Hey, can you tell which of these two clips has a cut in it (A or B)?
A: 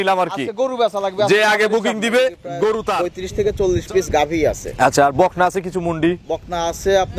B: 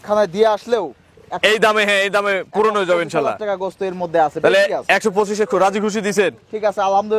A